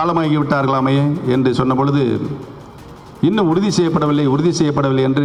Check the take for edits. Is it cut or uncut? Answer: uncut